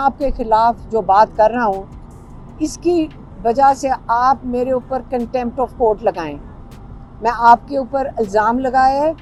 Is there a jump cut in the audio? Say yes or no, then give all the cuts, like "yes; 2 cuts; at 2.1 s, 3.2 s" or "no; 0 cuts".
no; 0 cuts